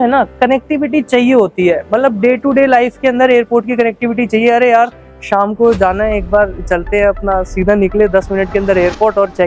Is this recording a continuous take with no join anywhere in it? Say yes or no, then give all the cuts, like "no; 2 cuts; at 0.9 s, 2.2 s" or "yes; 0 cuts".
yes; 0 cuts